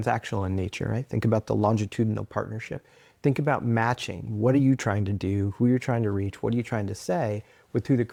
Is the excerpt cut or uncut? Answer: uncut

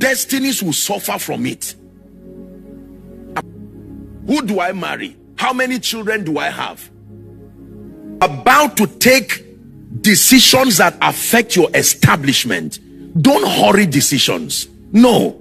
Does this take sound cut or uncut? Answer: cut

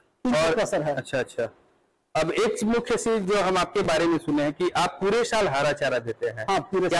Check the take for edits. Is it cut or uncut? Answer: uncut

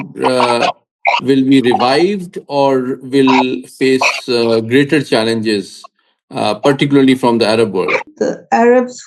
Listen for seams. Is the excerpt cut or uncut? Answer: cut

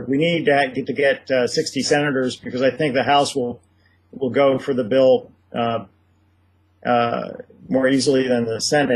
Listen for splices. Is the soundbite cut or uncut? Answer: uncut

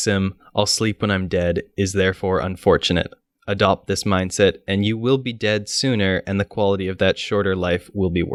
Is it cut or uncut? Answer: uncut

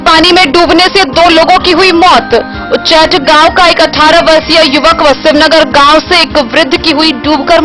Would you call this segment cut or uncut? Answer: uncut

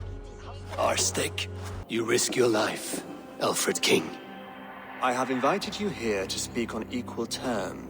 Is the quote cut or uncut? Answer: cut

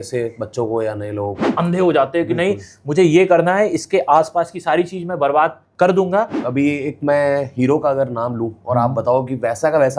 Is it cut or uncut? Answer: cut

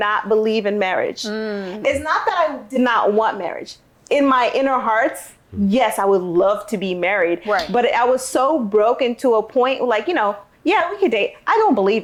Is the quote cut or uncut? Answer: uncut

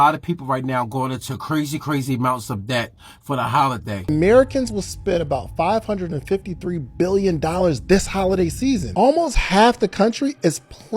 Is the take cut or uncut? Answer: cut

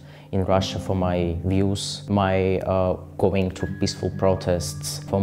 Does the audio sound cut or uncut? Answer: uncut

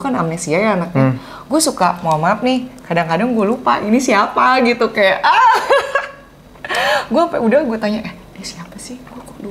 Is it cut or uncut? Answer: uncut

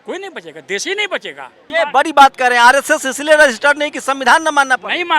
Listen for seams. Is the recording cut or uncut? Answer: cut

